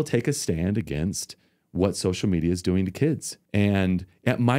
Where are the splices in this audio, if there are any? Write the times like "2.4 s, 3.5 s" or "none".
3.3 s